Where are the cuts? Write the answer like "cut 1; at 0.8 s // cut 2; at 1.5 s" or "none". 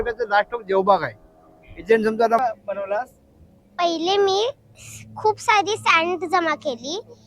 cut 1; at 2.4 s